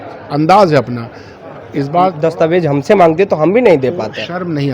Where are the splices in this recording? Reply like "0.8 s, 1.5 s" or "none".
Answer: 2.1 s

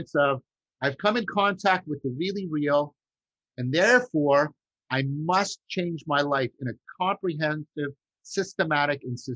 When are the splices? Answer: none

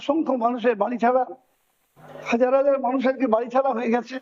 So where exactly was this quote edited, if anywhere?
none

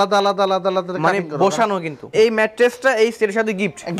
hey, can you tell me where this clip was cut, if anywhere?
2.0 s

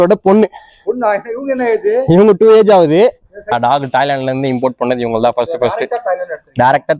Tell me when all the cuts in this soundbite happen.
3.5 s

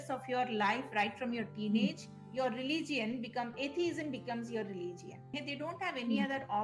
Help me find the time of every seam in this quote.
2.2 s, 5.4 s

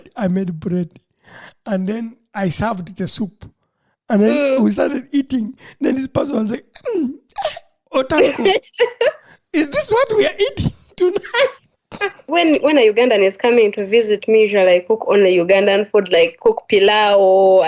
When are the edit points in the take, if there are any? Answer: 12.2 s

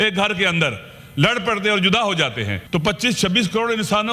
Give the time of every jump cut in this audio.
2.5 s

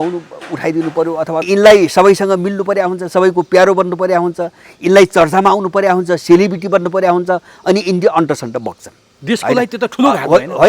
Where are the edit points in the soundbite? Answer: 1.5 s

